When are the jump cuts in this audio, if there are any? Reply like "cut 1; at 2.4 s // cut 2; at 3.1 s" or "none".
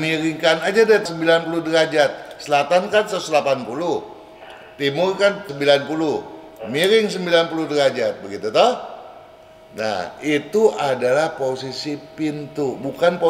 cut 1; at 1.1 s // cut 2; at 5.5 s